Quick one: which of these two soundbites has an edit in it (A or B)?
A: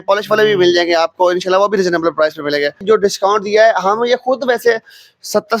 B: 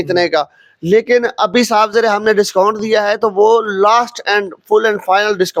A